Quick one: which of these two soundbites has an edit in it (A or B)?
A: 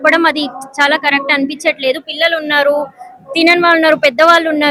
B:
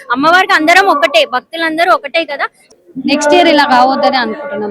B